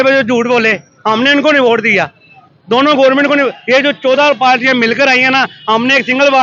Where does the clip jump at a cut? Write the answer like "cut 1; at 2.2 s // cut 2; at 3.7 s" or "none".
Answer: none